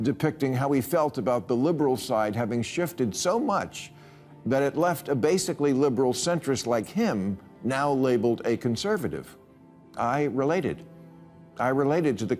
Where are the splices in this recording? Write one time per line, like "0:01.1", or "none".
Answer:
none